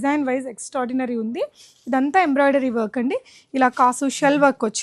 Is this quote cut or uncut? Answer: uncut